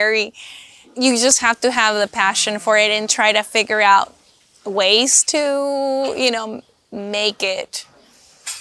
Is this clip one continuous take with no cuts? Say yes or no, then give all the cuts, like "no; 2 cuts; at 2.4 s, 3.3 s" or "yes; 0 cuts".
no; 1 cut; at 0.9 s